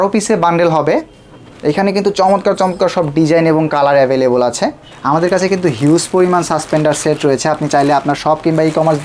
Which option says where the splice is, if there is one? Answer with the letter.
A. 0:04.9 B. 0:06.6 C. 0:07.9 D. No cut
A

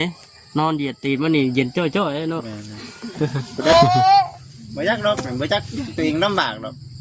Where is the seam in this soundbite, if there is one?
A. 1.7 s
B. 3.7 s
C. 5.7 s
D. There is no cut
B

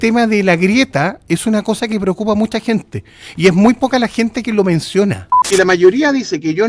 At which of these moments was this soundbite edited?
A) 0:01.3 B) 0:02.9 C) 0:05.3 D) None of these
C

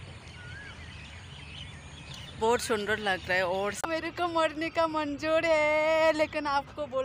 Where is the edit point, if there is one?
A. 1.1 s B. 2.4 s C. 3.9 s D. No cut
C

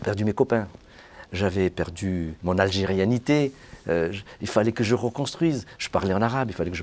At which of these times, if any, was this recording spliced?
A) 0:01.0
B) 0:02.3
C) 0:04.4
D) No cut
B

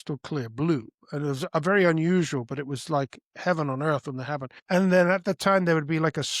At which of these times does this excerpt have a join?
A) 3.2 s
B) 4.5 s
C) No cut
B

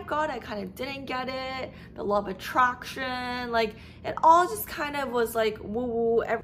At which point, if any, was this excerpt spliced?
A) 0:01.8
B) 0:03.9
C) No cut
C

